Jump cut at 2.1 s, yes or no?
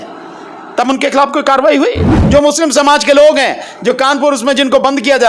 yes